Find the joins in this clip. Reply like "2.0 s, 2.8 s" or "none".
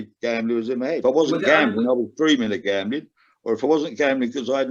1.0 s